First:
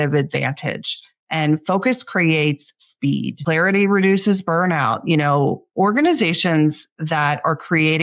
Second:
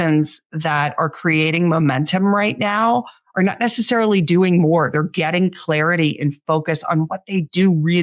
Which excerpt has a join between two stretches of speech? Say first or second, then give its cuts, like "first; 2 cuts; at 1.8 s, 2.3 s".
first; 1 cut; at 3.4 s